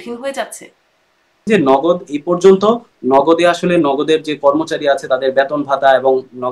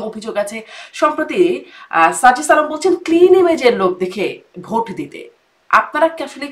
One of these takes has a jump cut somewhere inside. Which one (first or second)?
first